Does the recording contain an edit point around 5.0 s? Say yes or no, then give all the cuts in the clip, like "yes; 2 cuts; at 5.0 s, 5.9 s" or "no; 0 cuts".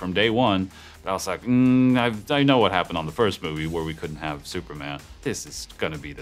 yes; 1 cut; at 5.0 s